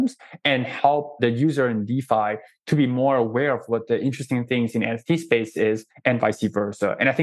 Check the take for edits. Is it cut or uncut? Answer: cut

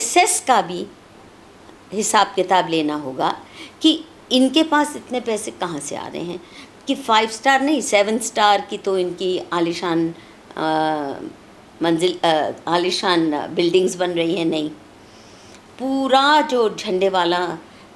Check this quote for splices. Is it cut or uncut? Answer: uncut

